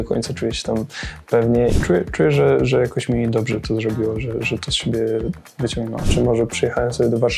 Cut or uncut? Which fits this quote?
cut